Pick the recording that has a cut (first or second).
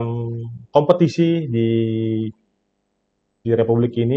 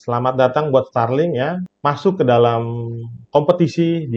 second